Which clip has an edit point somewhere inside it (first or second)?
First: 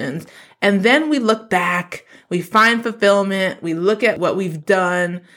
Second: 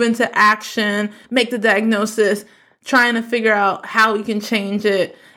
first